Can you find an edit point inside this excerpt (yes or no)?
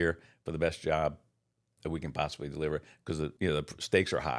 yes